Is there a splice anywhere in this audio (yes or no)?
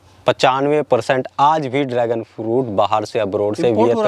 no